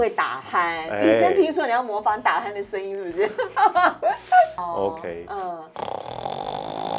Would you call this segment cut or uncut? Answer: cut